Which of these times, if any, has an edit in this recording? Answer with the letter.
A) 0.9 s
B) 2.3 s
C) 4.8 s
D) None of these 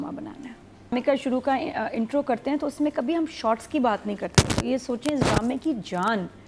A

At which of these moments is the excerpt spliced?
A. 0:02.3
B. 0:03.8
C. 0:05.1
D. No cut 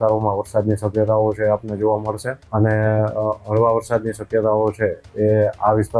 A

